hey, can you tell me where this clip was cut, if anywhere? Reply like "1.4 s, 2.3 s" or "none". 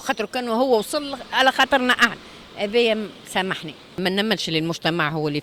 4.0 s